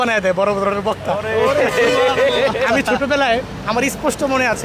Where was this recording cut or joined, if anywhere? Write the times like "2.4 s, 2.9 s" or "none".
none